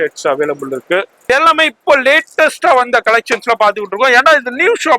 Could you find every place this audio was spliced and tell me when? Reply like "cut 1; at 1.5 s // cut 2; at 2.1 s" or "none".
cut 1; at 1.3 s